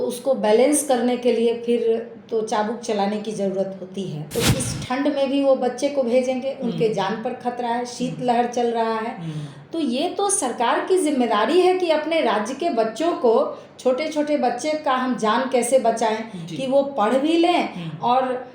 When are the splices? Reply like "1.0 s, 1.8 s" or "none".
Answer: 4.2 s